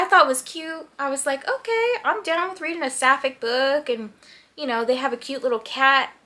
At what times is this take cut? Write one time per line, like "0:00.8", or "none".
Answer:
none